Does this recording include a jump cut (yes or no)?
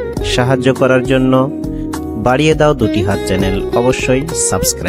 no